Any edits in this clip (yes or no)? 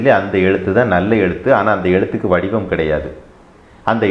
no